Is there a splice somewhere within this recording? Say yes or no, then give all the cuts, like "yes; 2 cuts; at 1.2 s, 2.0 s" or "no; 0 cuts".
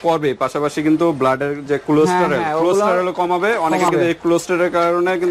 no; 0 cuts